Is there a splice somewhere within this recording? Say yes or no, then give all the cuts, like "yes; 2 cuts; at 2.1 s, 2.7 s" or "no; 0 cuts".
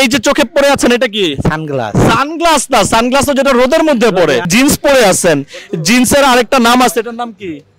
yes; 1 cut; at 4.5 s